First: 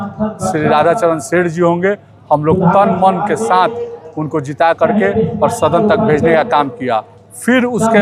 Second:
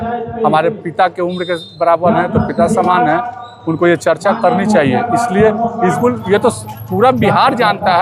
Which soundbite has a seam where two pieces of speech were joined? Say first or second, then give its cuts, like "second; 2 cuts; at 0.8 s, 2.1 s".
second; 1 cut; at 6.0 s